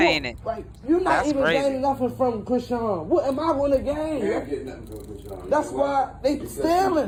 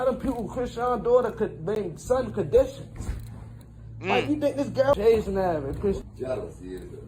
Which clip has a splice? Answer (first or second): second